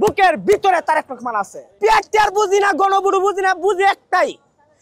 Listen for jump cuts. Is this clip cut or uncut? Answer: cut